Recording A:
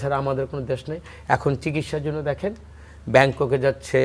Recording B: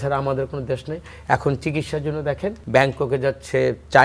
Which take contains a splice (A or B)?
B